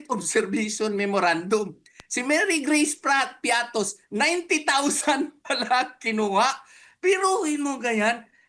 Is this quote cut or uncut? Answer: uncut